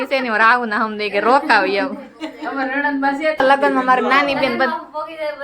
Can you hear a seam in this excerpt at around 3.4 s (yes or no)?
yes